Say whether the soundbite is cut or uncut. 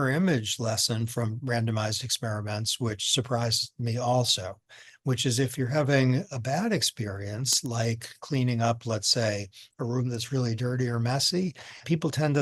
uncut